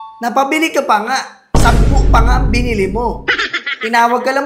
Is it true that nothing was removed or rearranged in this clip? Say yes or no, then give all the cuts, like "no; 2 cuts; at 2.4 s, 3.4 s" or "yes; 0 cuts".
yes; 0 cuts